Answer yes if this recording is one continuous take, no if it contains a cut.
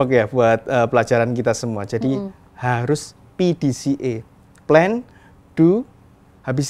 yes